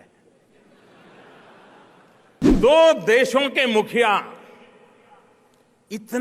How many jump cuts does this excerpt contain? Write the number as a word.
one